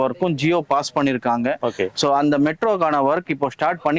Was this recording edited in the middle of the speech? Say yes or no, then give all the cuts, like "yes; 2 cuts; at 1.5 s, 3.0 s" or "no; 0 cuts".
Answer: no; 0 cuts